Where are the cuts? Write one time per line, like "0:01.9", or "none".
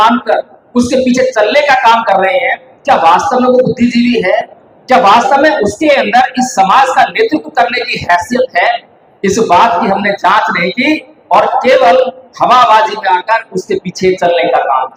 none

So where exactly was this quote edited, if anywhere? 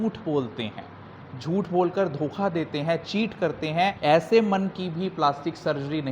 0:04.0

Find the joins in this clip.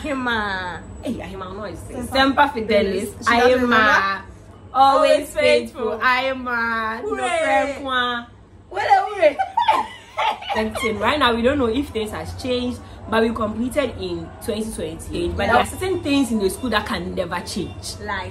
0:10.5
0:15.6

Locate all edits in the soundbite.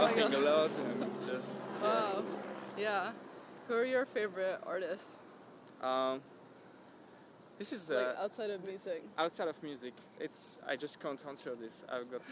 none

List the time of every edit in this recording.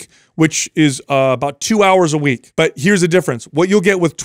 0:02.4

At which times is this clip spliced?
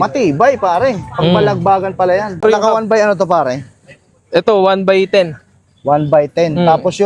0:02.4

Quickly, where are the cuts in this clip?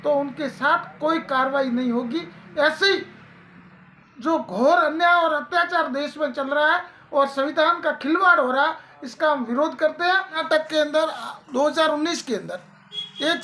0:10.4

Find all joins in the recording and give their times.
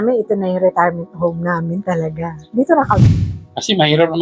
0:03.2

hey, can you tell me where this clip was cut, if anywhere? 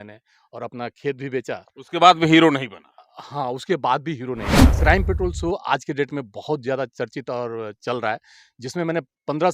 0:04.7

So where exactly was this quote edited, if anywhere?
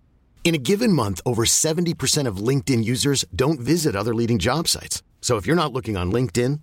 none

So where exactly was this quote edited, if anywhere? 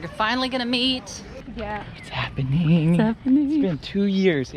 0:01.4

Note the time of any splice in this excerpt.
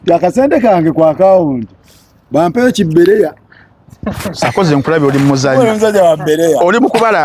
none

